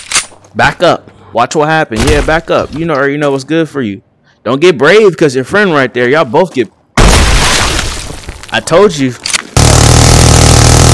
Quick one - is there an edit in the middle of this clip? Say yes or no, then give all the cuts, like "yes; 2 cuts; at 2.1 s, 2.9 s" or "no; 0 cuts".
yes; 3 cuts; at 1.2 s, 8.2 s, 9.7 s